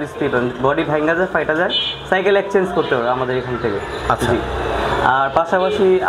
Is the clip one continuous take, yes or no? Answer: yes